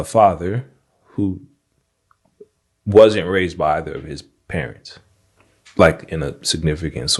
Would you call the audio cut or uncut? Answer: uncut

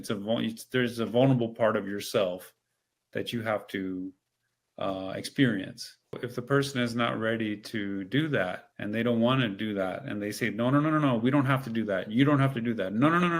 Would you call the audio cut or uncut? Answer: cut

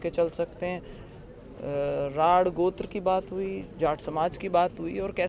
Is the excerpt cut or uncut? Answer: uncut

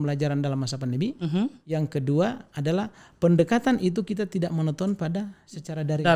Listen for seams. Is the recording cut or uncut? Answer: uncut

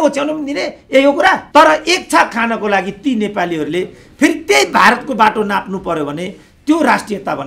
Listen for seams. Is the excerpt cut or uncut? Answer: cut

